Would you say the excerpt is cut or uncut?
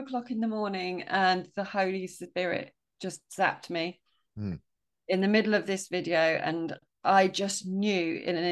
uncut